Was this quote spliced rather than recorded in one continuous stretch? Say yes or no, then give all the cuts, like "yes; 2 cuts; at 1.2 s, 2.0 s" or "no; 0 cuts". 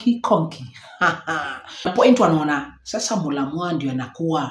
yes; 1 cut; at 1.9 s